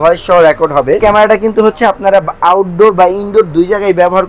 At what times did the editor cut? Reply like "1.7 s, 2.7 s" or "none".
1.0 s